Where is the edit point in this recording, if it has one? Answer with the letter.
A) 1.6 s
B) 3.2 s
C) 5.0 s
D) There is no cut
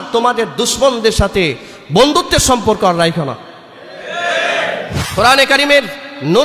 C